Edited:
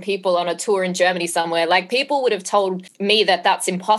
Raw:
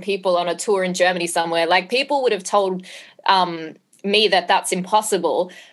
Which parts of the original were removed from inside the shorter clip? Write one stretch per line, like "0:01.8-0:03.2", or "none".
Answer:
0:02.9-0:03.9